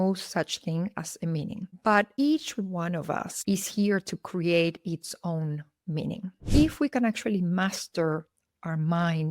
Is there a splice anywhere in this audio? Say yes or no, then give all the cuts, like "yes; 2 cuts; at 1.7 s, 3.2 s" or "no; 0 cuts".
yes; 1 cut; at 6.5 s